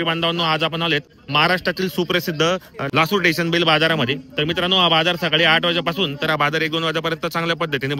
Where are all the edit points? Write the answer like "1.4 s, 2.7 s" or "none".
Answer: 2.8 s